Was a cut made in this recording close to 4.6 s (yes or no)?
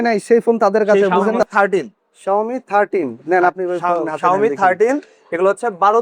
no